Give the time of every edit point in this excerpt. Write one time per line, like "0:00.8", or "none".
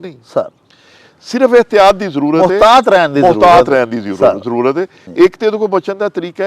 0:05.1